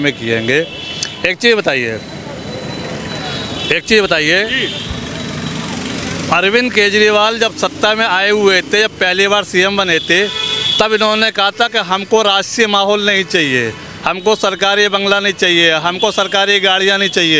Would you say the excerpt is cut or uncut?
uncut